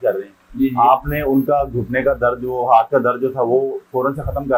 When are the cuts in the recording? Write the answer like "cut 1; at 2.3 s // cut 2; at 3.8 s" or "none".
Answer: none